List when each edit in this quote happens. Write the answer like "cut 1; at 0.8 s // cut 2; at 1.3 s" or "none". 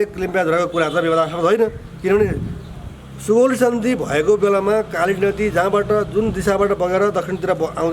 none